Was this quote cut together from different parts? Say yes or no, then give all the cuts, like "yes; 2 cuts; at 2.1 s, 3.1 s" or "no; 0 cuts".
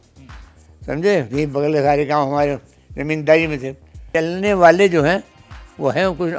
yes; 1 cut; at 4.0 s